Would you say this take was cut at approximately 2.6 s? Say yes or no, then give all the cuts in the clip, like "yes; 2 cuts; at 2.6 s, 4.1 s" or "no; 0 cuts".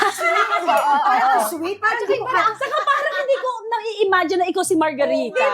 yes; 1 cut; at 2.6 s